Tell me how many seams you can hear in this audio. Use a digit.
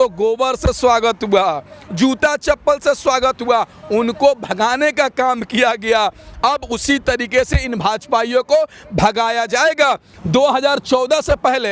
1